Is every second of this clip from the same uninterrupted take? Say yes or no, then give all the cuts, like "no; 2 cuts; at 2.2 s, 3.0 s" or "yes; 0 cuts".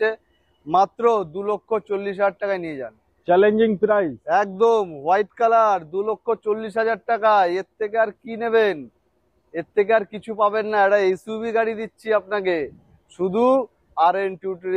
yes; 0 cuts